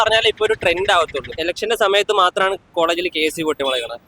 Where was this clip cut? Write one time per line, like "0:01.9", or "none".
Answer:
0:01.3